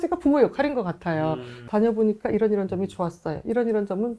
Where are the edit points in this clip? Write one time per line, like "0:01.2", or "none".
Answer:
0:01.5